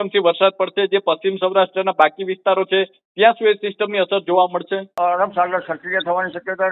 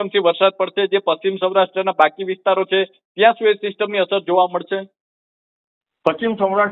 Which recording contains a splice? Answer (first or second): first